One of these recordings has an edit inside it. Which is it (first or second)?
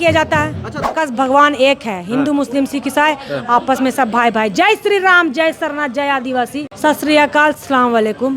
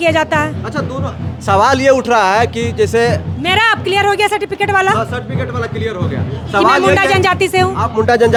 first